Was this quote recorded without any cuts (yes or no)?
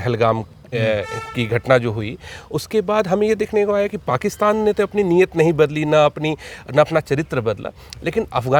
yes